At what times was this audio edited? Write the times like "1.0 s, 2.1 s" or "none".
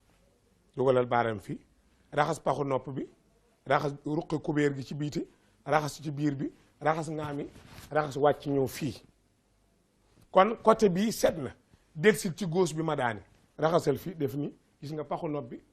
none